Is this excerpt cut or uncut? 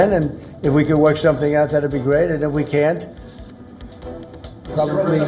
uncut